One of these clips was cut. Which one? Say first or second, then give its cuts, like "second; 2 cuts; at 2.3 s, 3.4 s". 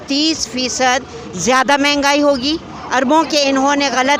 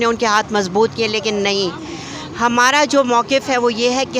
first; 1 cut; at 2.7 s